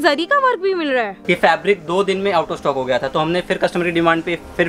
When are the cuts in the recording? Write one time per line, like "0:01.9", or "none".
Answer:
0:01.2